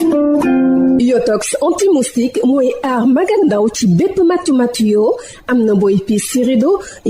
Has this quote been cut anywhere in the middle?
yes; 1 cut; at 0.9 s

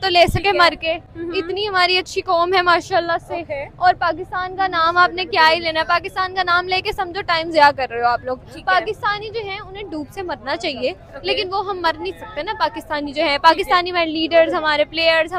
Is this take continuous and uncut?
yes; 0 cuts

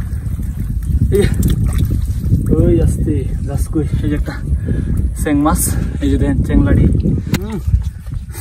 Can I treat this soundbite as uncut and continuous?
no; 1 cut; at 7.4 s

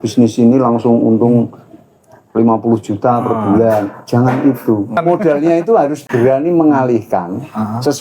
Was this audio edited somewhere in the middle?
yes; 1 cut; at 5.0 s

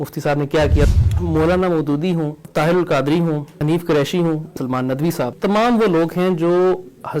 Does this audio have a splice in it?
yes; 4 cuts; at 0.9 s, 2.4 s, 3.5 s, 4.9 s

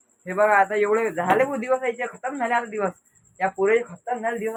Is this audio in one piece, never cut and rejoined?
yes; 0 cuts

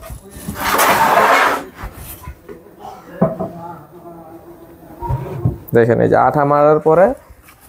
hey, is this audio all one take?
yes; 0 cuts

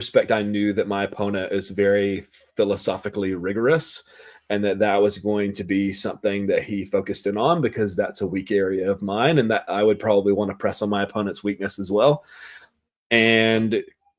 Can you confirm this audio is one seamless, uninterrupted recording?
yes; 0 cuts

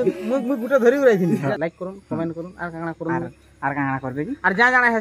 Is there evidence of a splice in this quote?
yes; 1 cut; at 1.5 s

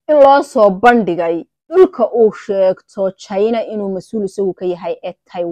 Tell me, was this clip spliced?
yes; 1 cut; at 1.8 s

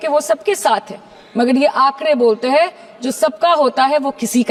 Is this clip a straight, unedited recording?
yes; 0 cuts

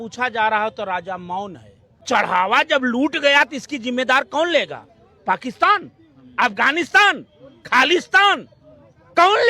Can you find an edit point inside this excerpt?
yes; 1 cut; at 2.1 s

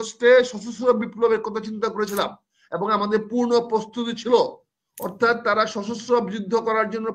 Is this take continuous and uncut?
yes; 0 cuts

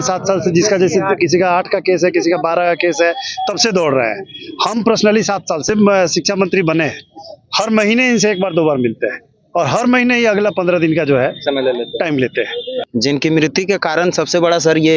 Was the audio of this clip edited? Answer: yes; 2 cuts; at 5.6 s, 12.8 s

